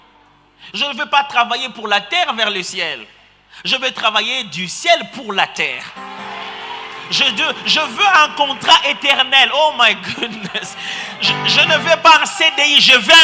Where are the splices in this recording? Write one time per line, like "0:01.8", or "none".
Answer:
none